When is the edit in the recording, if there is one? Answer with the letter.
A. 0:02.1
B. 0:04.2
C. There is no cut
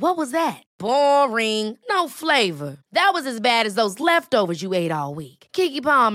C